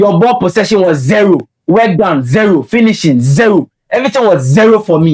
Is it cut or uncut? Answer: uncut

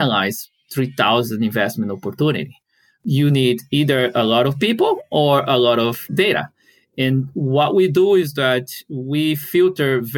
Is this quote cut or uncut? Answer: uncut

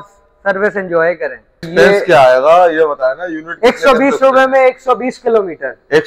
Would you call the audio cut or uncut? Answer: cut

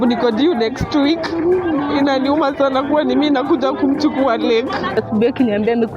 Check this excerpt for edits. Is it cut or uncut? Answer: cut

